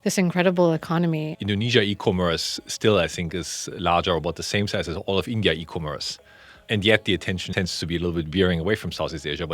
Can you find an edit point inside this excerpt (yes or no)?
yes